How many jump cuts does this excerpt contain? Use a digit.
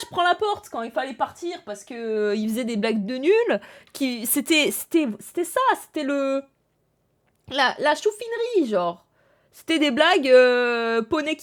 0